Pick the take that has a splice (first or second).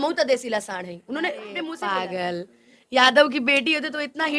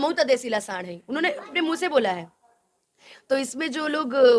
first